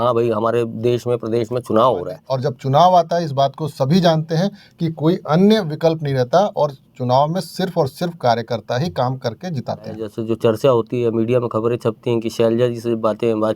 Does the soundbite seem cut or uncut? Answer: cut